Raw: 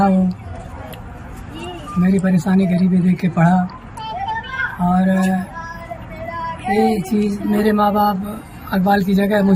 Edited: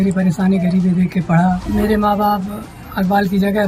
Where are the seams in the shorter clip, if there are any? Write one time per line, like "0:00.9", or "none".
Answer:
0:01.6